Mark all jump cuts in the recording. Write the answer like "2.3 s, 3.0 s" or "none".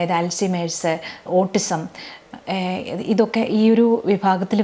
none